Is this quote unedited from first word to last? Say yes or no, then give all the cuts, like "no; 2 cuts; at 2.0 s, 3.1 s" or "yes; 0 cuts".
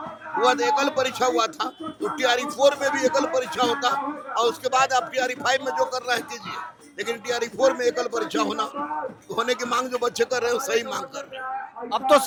yes; 0 cuts